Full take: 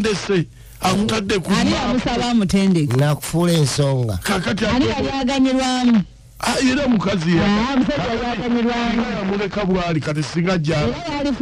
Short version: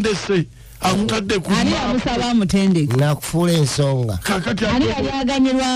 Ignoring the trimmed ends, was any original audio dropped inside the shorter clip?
no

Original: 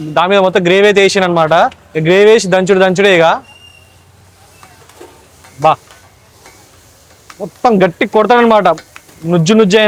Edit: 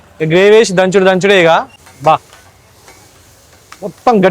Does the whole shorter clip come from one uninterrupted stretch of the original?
no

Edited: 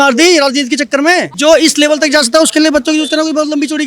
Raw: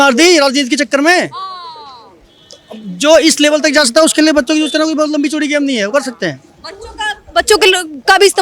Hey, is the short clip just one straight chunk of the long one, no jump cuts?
no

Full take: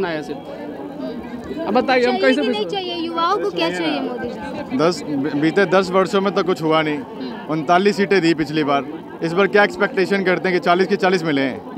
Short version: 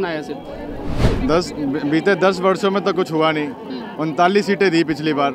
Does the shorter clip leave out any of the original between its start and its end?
yes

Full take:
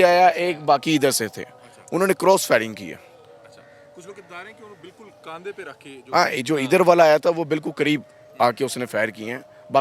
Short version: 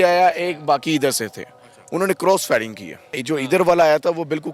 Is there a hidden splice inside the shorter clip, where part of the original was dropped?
yes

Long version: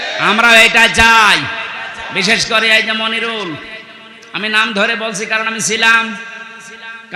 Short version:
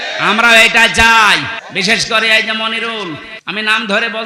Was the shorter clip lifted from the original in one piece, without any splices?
no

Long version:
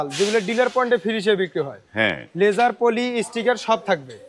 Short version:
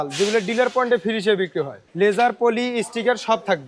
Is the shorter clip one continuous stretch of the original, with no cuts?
no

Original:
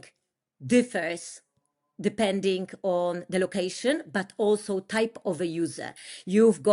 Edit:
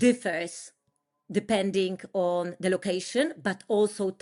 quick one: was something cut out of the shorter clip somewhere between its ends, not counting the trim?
no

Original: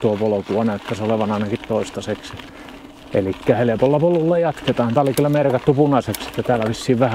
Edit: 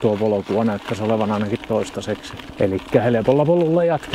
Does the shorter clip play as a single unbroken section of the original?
no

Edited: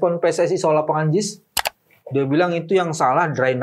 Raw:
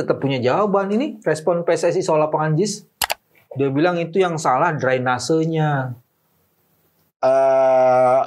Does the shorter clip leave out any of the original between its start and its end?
no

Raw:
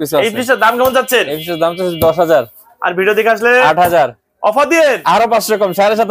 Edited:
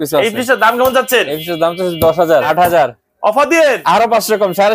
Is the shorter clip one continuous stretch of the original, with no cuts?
no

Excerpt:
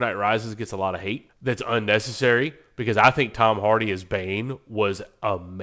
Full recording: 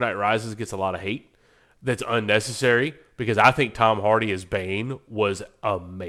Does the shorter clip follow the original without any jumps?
no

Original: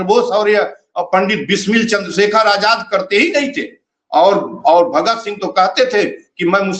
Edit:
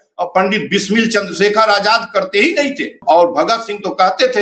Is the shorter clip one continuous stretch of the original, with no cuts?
no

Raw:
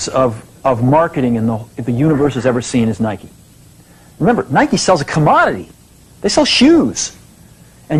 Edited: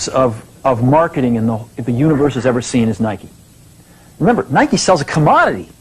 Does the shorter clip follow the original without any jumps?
yes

